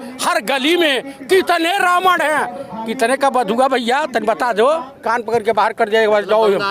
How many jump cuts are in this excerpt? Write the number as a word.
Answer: one